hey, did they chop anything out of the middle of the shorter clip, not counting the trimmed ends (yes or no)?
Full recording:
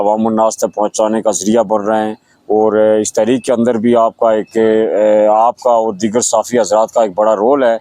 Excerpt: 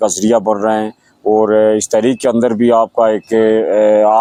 no